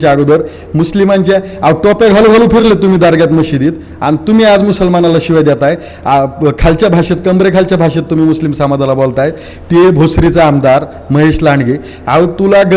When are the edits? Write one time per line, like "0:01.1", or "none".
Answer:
none